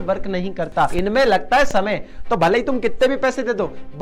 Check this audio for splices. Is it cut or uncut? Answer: cut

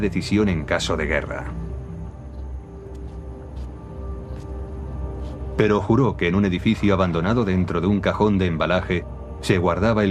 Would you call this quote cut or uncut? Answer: uncut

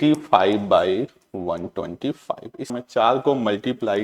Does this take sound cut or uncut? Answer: cut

